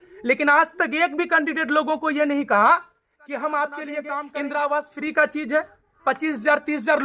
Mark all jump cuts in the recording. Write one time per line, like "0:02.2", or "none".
0:04.2